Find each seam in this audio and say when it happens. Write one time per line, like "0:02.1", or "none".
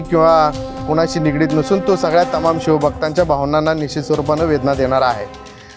none